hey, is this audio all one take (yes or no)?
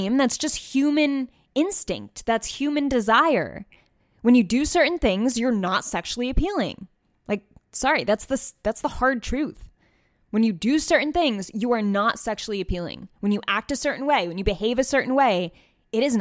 yes